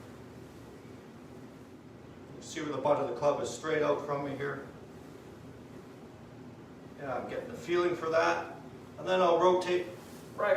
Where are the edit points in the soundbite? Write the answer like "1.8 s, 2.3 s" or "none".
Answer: 1.8 s